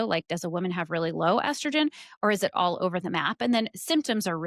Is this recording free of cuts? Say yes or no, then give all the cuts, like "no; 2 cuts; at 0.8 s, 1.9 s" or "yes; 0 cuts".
yes; 0 cuts